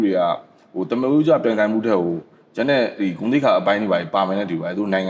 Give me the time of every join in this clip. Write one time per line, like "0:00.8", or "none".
none